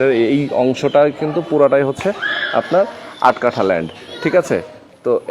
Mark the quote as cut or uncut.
uncut